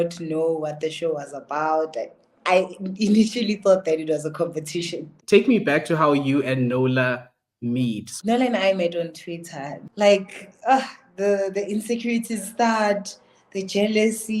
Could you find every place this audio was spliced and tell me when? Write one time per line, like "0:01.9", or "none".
0:05.1
0:08.1
0:09.8